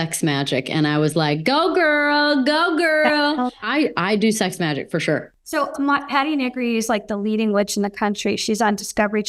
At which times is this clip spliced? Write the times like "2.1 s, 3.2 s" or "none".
3.6 s